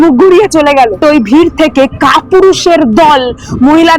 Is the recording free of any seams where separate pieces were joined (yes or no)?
no